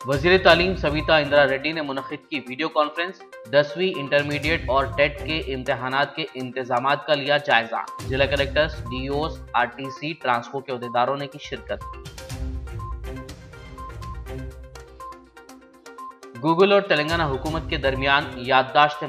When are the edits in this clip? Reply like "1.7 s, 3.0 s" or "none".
none